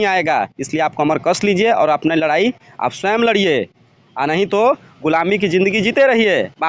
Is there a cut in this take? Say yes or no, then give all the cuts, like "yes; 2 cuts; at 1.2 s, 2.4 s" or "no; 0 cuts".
no; 0 cuts